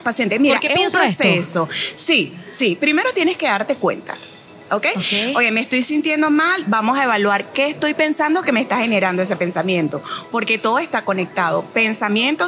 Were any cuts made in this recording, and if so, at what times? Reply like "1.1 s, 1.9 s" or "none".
none